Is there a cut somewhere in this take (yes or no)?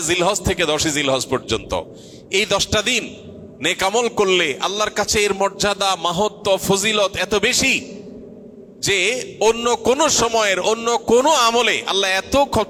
no